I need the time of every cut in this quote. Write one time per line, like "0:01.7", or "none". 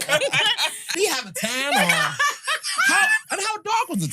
0:00.9